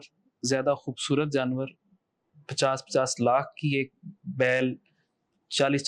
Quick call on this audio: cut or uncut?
uncut